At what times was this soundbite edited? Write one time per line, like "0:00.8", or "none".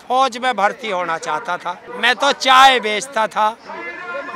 0:01.9